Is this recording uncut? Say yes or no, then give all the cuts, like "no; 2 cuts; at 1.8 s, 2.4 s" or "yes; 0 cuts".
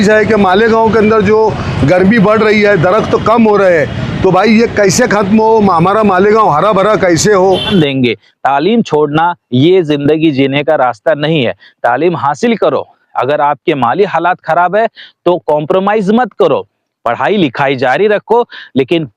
no; 1 cut; at 7.7 s